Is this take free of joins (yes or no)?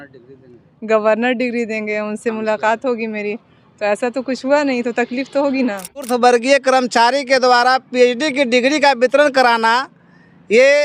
no